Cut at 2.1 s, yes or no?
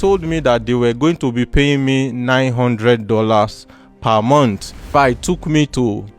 no